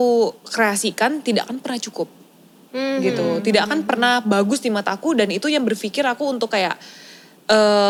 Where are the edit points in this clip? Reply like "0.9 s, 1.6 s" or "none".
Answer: none